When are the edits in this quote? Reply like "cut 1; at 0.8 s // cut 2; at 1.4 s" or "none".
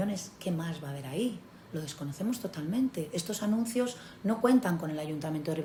none